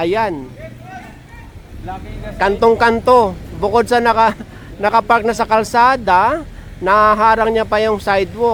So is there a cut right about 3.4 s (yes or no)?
no